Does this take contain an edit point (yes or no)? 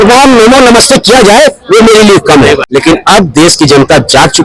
yes